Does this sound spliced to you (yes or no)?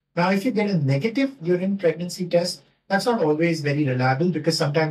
no